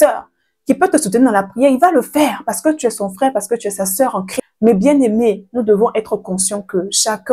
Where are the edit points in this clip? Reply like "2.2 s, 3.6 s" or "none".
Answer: 4.3 s